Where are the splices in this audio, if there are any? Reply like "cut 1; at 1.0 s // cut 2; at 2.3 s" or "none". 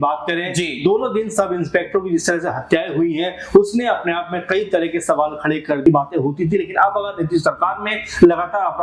cut 1; at 5.8 s